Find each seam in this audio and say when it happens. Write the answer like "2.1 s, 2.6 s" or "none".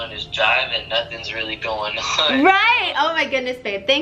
none